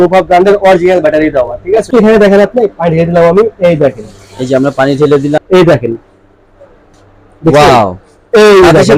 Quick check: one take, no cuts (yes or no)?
no